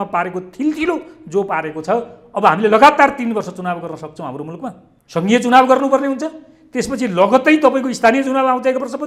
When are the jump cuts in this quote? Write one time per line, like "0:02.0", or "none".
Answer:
0:04.9